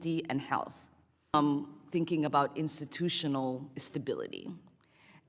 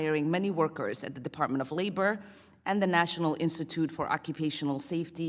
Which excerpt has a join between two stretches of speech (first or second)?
first